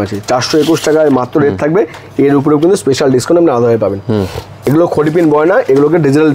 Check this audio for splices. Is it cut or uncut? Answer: cut